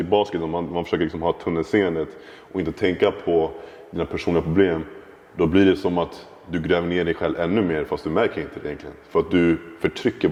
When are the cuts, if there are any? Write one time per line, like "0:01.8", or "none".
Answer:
none